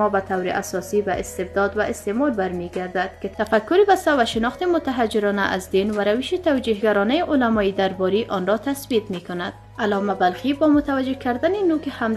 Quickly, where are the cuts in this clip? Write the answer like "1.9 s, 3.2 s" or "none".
none